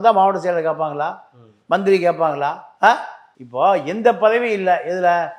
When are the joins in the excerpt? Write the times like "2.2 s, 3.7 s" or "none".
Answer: none

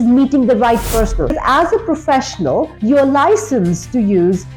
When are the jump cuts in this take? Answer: 1.3 s

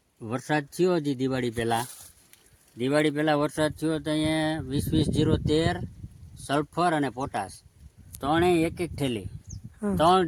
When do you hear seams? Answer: none

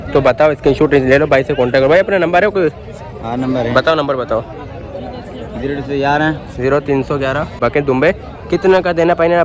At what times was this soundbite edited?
7.6 s

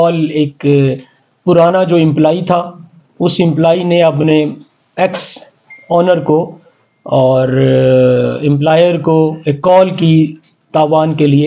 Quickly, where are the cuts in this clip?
none

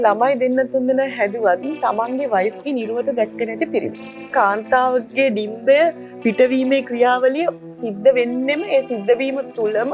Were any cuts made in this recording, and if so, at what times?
4.3 s

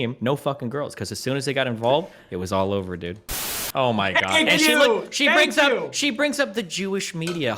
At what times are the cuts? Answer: 3.4 s

